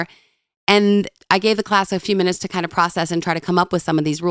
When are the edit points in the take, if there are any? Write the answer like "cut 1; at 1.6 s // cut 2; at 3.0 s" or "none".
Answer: cut 1; at 1.2 s